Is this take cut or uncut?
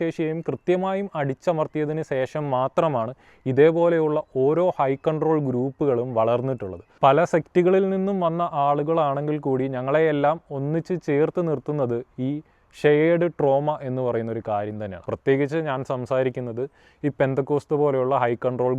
cut